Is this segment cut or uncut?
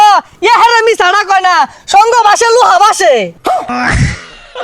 cut